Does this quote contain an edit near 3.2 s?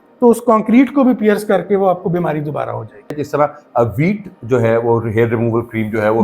yes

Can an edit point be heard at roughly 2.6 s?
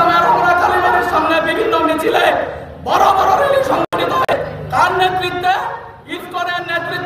no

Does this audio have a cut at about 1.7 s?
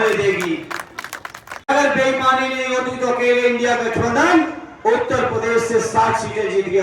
yes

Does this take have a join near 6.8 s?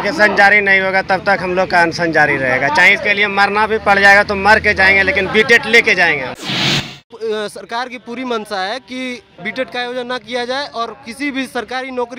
yes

